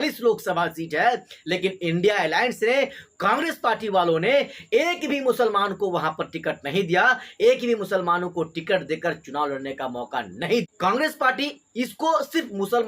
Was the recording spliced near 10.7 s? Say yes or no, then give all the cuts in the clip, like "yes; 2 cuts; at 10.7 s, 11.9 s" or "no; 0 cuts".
yes; 1 cut; at 10.7 s